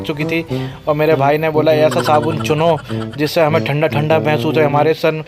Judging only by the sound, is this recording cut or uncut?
uncut